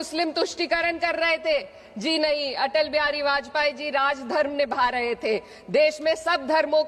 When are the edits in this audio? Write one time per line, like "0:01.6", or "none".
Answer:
none